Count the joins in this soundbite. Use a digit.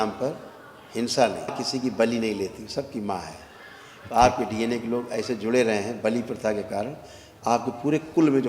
1